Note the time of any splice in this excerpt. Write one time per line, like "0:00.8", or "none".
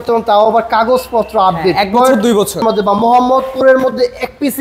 0:02.6